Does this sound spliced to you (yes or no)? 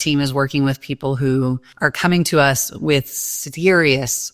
yes